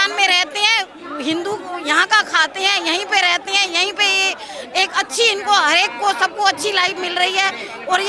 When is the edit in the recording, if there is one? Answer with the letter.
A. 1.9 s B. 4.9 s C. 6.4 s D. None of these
D